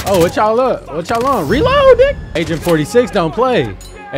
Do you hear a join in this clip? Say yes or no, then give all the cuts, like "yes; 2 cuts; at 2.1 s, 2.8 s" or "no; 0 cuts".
yes; 1 cut; at 2.2 s